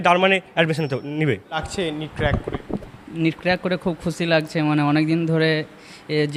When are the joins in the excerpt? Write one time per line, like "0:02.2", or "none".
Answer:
none